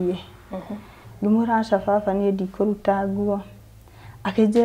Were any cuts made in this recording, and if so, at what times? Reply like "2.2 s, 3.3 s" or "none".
1.0 s